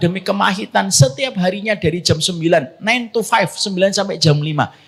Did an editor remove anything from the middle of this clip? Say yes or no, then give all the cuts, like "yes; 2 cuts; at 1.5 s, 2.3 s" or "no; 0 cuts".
no; 0 cuts